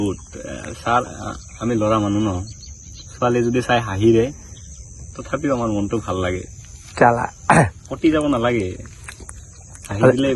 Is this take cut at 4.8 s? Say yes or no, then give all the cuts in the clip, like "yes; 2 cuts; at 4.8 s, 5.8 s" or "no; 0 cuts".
no; 0 cuts